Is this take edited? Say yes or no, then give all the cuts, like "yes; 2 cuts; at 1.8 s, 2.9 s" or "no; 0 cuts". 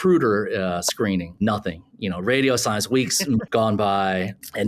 yes; 1 cut; at 3.4 s